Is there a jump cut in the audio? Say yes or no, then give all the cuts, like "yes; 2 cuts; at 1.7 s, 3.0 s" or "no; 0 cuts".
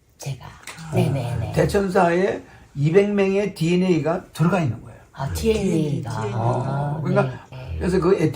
yes; 1 cut; at 7.4 s